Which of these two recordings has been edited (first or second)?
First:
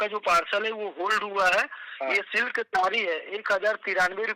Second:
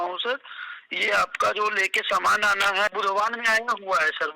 second